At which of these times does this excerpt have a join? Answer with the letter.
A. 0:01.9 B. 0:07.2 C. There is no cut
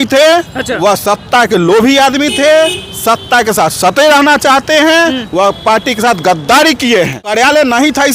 B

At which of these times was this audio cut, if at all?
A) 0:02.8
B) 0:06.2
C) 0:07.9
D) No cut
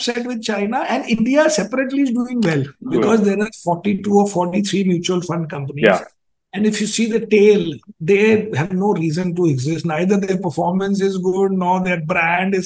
A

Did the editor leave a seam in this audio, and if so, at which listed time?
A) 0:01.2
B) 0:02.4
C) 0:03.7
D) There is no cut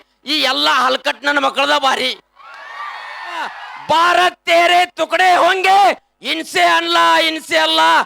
C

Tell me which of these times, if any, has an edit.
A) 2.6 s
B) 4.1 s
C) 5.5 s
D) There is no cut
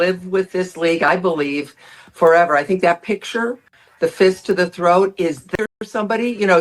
C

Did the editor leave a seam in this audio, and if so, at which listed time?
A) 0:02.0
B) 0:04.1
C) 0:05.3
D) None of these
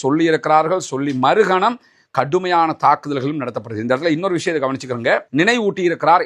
C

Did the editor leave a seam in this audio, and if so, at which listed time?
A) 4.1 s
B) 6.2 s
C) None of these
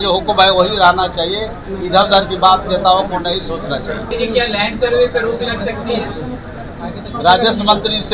A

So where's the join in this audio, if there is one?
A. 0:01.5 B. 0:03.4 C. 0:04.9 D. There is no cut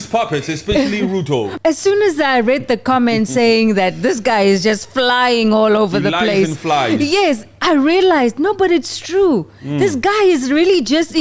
A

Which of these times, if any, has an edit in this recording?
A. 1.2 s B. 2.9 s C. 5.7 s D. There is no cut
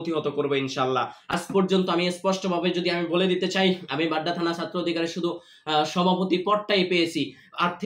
A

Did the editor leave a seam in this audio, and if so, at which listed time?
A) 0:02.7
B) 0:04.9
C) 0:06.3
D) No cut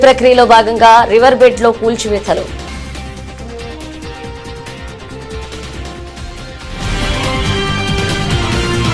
A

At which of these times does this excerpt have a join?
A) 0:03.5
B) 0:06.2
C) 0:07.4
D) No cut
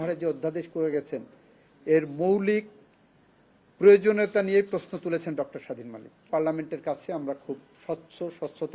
B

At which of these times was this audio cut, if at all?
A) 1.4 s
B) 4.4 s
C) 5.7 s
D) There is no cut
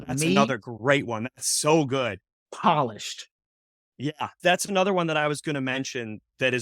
B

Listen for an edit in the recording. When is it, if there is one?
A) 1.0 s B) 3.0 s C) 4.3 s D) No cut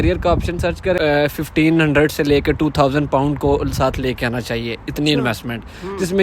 A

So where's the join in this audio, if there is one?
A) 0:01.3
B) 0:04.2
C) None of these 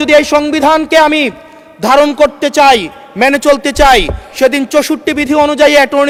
C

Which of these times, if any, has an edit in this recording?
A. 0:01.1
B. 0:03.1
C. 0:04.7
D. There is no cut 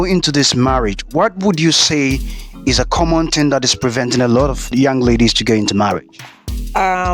C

